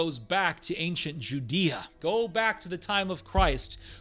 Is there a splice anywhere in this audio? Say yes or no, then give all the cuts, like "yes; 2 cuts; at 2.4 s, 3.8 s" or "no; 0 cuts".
yes; 1 cut; at 1.9 s